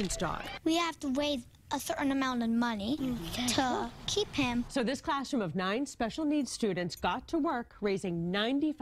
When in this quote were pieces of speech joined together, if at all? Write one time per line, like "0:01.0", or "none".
none